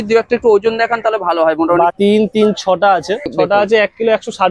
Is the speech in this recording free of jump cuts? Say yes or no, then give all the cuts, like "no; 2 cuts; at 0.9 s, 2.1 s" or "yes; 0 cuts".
no; 2 cuts; at 1.9 s, 3.3 s